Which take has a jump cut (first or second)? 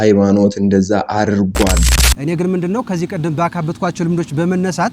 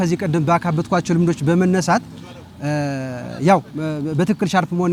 first